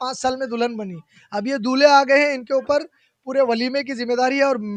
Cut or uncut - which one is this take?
uncut